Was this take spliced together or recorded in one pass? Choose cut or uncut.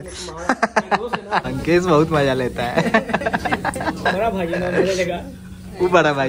cut